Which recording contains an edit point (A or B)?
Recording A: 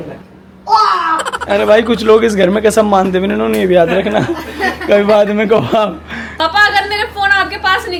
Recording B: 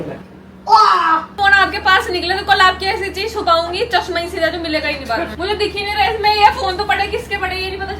B